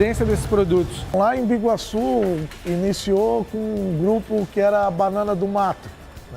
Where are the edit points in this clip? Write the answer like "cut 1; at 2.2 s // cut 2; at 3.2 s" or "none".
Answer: cut 1; at 1.0 s

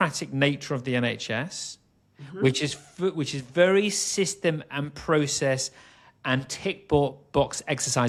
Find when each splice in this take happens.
none

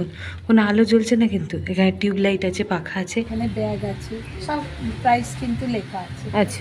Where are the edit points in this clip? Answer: cut 1; at 3.3 s

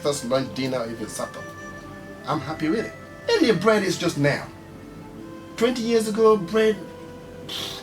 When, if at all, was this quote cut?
cut 1; at 3.0 s

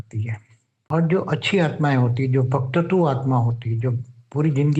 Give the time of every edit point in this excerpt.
cut 1; at 0.9 s

